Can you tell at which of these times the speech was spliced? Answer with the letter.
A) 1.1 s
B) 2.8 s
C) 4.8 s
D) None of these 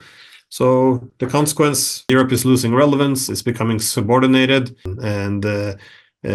C